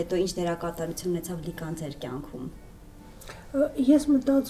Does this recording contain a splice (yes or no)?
no